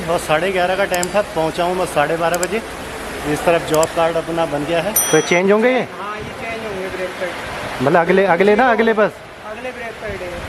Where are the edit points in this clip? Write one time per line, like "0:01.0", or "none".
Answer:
0:05.0